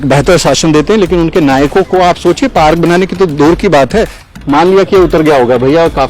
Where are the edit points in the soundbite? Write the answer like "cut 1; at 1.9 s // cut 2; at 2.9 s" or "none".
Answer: cut 1; at 4.3 s